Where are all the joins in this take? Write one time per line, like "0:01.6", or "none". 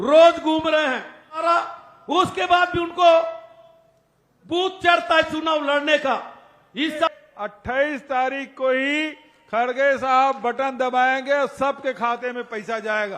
0:01.4
0:07.1